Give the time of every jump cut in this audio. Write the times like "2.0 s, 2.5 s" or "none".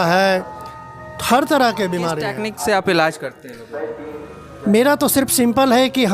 2.4 s